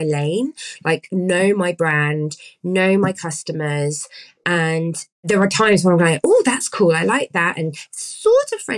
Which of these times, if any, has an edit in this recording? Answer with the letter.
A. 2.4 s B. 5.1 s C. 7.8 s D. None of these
B